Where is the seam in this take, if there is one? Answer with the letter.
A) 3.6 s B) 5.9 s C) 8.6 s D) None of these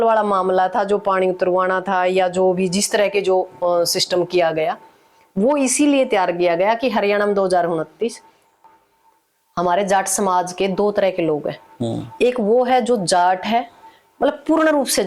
C